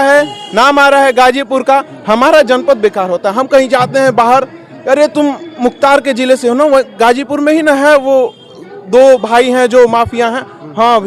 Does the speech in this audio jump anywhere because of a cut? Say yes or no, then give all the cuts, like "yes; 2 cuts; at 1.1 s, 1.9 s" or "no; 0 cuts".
no; 0 cuts